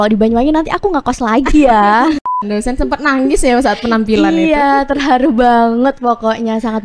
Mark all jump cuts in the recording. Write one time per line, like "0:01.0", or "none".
0:02.2